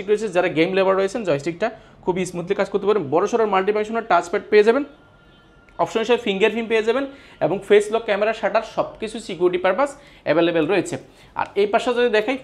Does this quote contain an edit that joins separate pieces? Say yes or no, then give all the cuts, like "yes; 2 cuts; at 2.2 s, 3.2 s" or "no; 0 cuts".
no; 0 cuts